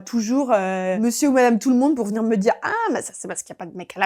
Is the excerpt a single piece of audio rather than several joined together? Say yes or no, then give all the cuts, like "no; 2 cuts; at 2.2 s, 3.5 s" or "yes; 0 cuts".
yes; 0 cuts